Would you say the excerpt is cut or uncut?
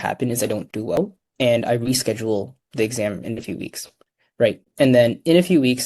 cut